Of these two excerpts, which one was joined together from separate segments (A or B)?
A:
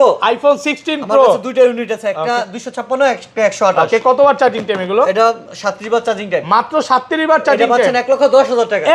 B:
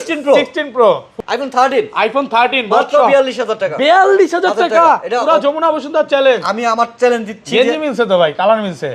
B